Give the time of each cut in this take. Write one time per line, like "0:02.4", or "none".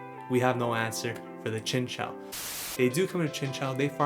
0:02.4